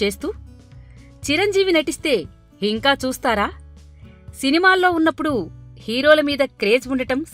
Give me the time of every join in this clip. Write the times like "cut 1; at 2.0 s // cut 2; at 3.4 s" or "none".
cut 1; at 5.9 s